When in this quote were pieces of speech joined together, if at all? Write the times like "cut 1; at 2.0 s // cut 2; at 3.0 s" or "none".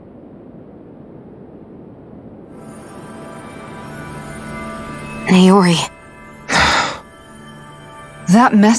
cut 1; at 0.9 s